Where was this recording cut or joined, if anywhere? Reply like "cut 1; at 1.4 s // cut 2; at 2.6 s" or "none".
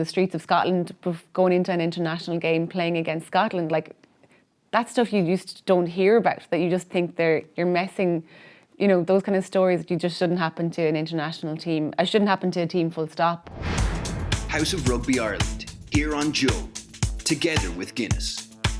cut 1; at 13.5 s

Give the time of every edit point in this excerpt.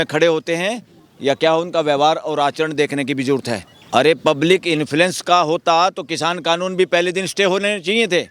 cut 1; at 3.7 s

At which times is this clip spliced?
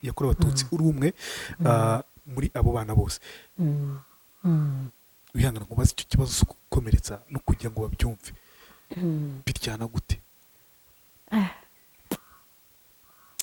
none

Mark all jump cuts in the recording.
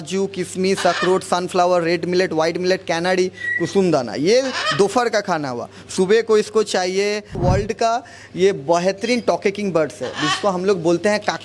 cut 1; at 7.4 s

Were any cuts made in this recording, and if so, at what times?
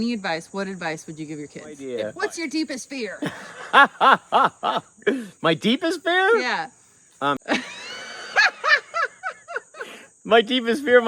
cut 1; at 1.8 s // cut 2; at 7.4 s

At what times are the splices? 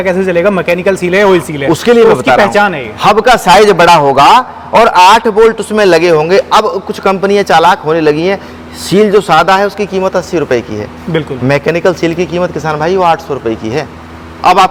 none

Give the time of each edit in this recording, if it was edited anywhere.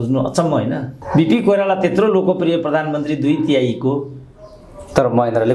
cut 1; at 1.0 s

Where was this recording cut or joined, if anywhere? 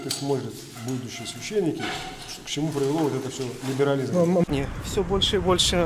cut 1; at 4.5 s

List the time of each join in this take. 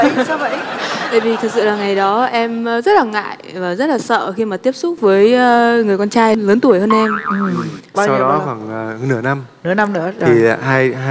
none

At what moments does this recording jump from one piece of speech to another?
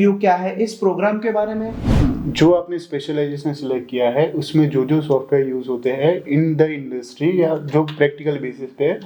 cut 1; at 1.9 s

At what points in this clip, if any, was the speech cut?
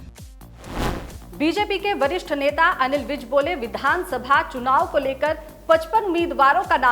cut 1; at 1.1 s

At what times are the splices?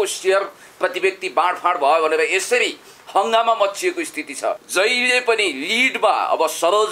cut 1; at 4.6 s

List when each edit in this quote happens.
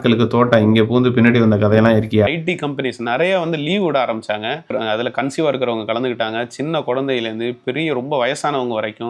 cut 1; at 2.3 s

